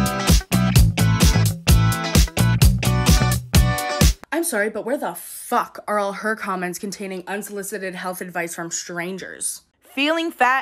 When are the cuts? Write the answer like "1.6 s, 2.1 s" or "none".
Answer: 9.6 s